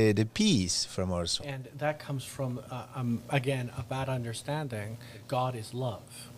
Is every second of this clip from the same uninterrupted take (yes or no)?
no